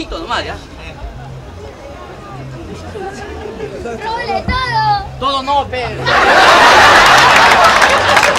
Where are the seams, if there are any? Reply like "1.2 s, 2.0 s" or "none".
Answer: none